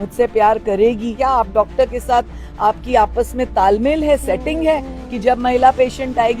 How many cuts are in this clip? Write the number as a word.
one